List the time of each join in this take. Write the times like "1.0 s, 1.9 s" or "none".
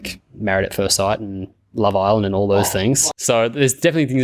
3.1 s